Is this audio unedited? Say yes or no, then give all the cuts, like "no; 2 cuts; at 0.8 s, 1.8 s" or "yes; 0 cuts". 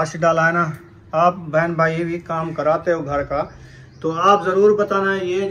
yes; 0 cuts